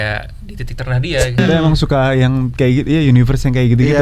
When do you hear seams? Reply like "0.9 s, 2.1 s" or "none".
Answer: 1.4 s